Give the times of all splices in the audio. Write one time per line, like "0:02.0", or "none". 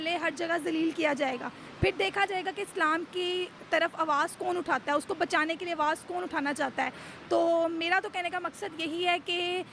none